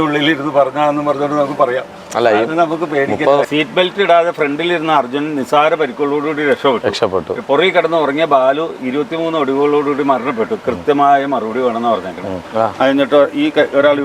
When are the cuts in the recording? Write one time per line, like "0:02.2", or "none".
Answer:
0:03.5
0:12.5

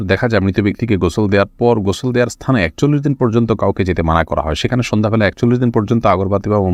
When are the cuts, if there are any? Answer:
none

